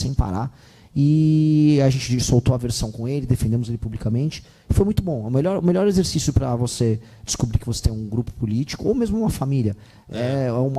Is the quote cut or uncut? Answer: uncut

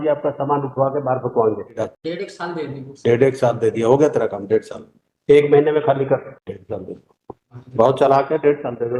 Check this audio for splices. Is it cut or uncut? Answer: cut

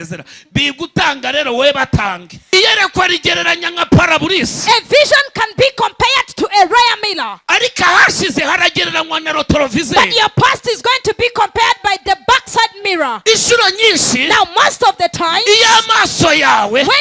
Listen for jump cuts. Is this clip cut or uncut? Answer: cut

